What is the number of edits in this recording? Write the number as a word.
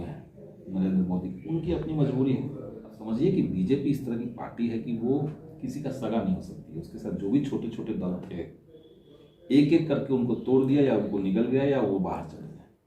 one